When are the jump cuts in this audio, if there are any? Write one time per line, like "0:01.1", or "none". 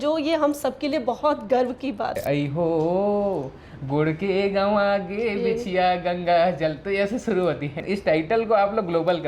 0:02.2
0:07.8